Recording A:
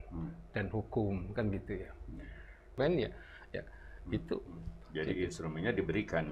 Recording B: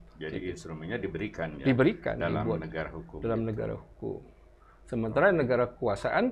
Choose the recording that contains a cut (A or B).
A